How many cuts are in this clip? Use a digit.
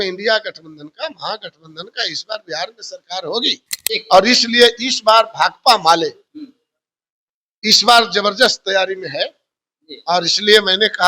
1